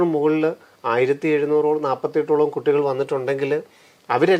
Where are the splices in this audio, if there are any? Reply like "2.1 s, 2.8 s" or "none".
none